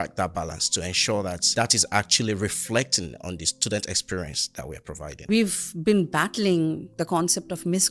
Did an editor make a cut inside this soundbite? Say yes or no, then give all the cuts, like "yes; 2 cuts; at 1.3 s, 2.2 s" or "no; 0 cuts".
yes; 2 cuts; at 1.4 s, 5.3 s